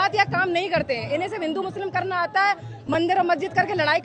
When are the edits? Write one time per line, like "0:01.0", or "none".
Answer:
none